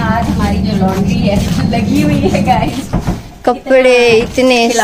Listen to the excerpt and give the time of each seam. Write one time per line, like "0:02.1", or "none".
none